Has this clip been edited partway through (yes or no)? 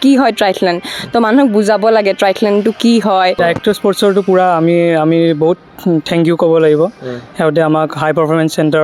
yes